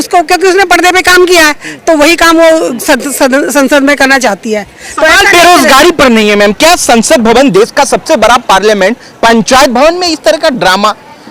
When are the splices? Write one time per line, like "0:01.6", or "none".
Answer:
none